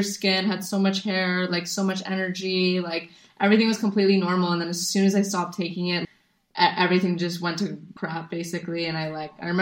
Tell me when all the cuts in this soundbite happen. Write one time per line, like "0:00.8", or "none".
0:06.0
0:07.9